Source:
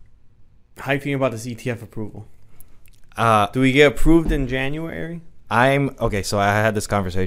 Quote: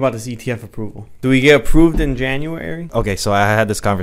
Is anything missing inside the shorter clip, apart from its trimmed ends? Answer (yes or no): yes